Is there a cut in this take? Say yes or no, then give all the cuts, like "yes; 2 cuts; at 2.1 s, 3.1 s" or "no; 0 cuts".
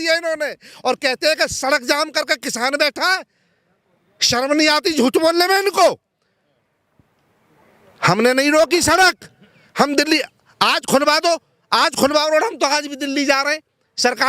no; 0 cuts